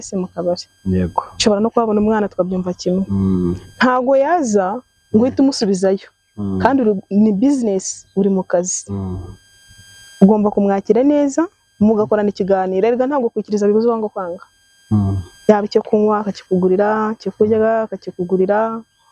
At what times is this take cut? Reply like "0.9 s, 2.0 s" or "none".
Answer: none